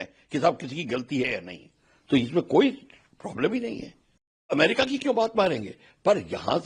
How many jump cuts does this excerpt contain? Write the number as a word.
one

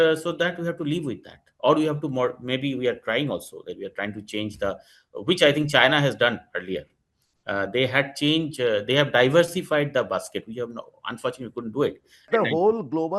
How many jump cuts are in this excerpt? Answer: one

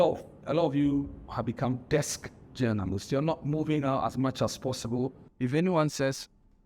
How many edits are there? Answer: one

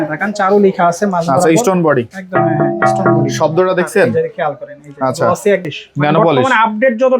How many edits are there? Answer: one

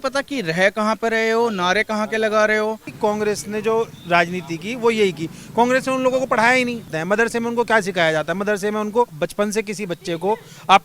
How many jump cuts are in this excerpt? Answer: three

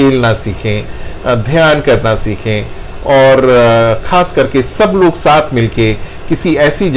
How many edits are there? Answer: zero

